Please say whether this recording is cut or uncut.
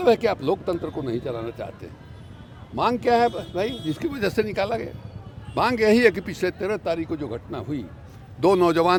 uncut